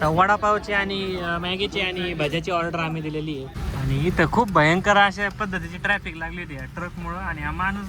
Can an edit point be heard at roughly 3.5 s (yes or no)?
yes